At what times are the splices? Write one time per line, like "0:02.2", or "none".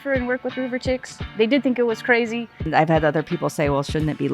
0:01.2
0:02.6